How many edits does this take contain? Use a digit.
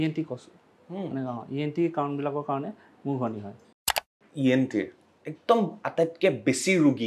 1